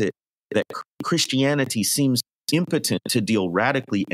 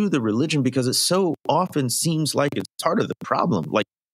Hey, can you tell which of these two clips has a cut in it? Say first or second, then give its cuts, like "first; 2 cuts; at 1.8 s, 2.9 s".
first; 2 cuts; at 0.7 s, 2.3 s